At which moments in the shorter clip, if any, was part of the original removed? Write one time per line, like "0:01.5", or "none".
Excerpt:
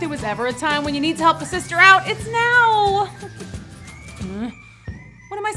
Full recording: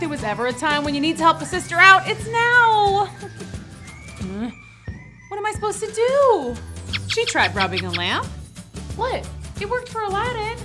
none